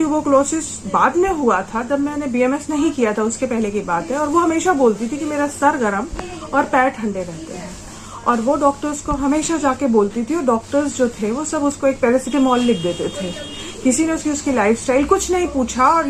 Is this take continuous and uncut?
yes; 0 cuts

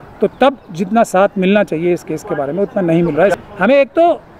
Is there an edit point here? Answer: yes; 1 cut; at 3.3 s

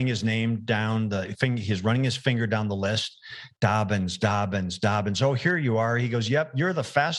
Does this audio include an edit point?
no; 0 cuts

